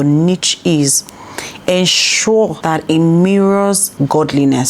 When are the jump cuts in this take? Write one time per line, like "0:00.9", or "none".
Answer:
0:02.6
0:03.9